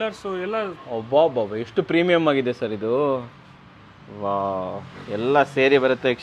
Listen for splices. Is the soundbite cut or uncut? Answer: uncut